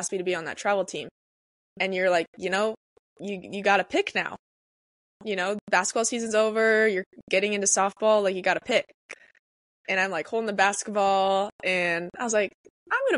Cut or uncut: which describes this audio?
uncut